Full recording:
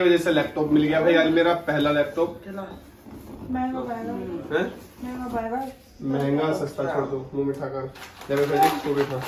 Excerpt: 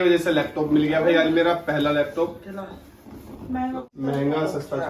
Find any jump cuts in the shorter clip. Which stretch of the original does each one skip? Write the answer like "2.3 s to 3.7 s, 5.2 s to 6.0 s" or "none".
3.8 s to 5.9 s